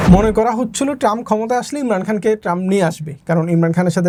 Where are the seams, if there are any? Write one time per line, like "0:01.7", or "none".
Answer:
none